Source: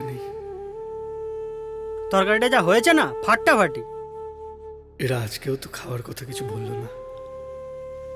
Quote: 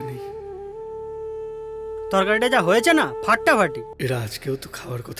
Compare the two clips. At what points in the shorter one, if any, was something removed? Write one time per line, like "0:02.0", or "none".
0:03.9